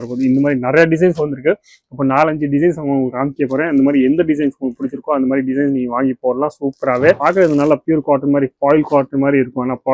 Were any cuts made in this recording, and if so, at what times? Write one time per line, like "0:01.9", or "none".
0:07.2